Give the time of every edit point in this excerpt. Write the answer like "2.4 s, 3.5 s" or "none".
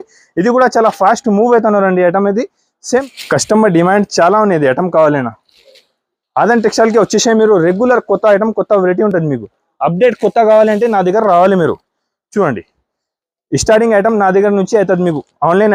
3.0 s

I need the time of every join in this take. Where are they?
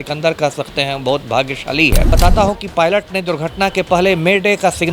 2.1 s

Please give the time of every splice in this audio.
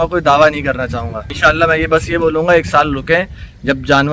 1.2 s

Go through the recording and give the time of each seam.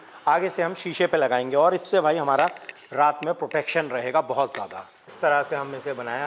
5.1 s

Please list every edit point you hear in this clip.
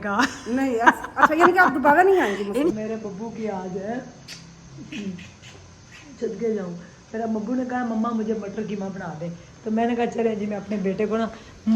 2.8 s

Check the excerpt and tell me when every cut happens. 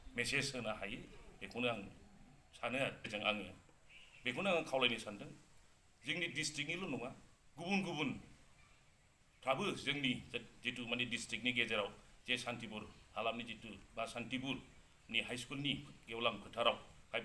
3.1 s

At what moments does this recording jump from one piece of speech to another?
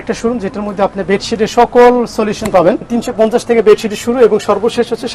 2.9 s

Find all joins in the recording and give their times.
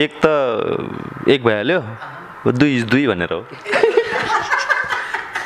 none

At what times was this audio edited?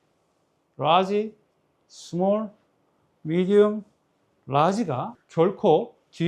5.2 s

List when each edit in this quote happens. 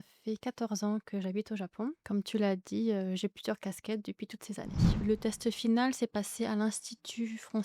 2.0 s, 5.0 s

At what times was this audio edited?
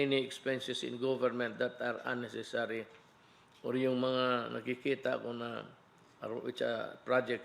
1.8 s

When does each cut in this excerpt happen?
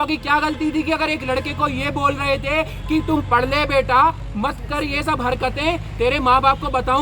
none

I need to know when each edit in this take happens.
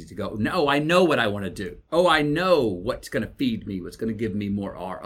none

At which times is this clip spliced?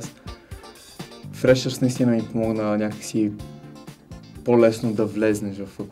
none

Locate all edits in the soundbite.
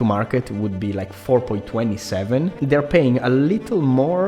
2.6 s

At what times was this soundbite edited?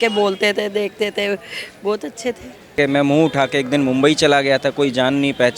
2.8 s

